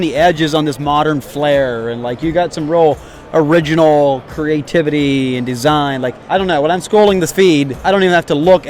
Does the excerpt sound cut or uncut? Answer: cut